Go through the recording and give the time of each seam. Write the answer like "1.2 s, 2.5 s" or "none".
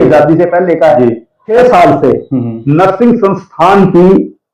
1.4 s